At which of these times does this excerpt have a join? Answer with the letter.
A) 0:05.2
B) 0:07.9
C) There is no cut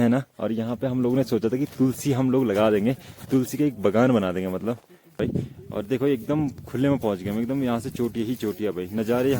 A